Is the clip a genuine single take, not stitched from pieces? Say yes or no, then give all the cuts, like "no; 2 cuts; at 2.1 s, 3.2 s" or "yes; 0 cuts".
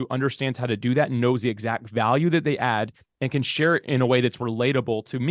yes; 0 cuts